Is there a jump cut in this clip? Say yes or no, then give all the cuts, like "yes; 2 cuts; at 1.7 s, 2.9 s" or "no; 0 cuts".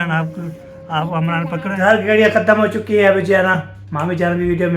yes; 1 cut; at 1.8 s